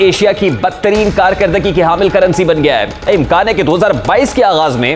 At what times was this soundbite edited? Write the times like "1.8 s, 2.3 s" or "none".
3.1 s